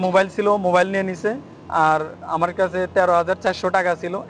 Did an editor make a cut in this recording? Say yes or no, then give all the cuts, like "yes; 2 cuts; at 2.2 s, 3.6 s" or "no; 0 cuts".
no; 0 cuts